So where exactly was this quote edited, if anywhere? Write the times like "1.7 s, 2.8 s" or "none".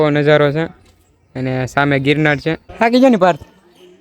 2.7 s